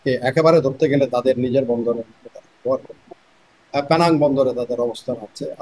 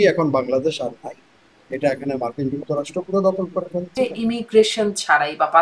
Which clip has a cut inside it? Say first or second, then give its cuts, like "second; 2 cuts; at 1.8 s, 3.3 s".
second; 1 cut; at 3.9 s